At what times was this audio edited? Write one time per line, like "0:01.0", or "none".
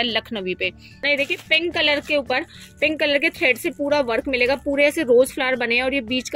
0:01.0